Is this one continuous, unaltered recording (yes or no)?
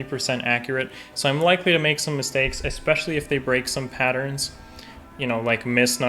yes